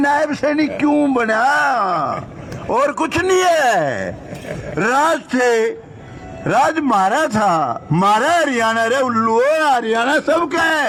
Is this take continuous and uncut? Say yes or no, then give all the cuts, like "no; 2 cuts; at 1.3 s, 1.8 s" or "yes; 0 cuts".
yes; 0 cuts